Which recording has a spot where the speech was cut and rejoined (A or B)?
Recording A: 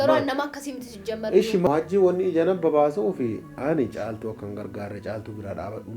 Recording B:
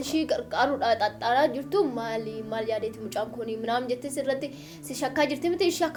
A